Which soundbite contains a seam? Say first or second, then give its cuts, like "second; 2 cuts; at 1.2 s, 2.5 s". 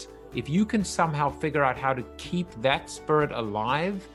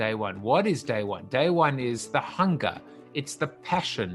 second; 1 cut; at 2.0 s